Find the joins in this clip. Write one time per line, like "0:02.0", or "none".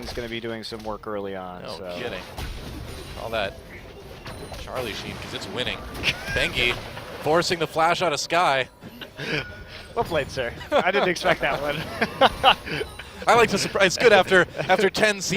0:05.6